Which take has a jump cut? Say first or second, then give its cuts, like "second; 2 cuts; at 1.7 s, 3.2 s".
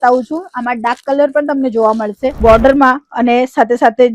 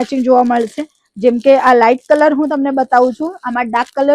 first; 1 cut; at 2.3 s